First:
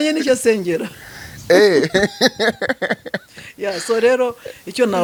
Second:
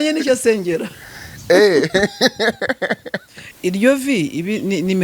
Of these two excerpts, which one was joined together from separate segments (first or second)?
second